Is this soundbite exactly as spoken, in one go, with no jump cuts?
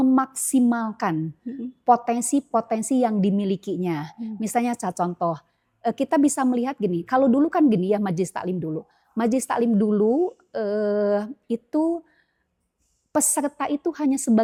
yes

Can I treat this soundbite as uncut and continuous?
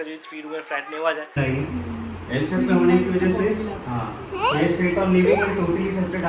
no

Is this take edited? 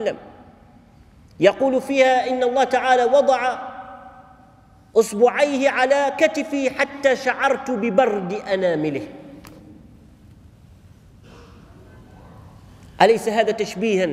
no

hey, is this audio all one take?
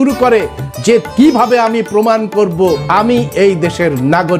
no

